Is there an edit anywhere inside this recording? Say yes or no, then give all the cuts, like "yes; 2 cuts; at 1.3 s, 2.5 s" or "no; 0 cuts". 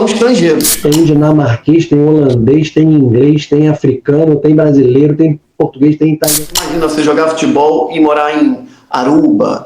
yes; 2 cuts; at 0.8 s, 6.7 s